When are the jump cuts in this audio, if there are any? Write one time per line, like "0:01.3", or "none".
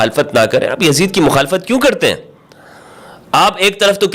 none

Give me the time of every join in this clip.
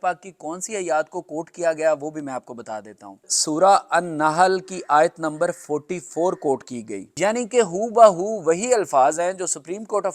0:03.3
0:07.0

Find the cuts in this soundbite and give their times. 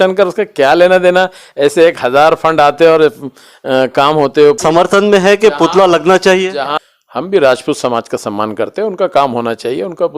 0:04.6
0:06.7

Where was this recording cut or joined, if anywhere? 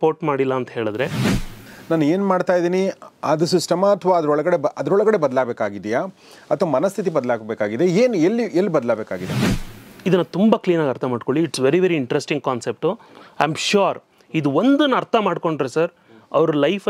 0:01.5
0:09.4

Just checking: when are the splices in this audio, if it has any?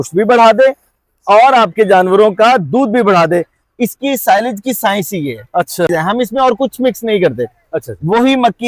0:05.9

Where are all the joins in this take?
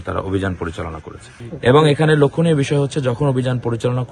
0:01.4

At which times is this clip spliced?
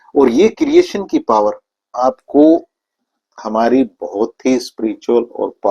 0:01.9

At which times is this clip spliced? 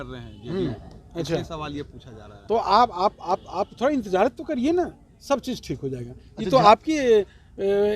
none

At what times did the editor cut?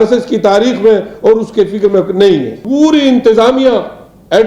0:02.6

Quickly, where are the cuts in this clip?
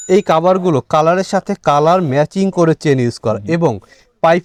none

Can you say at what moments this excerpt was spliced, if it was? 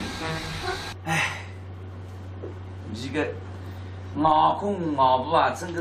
0:03.4

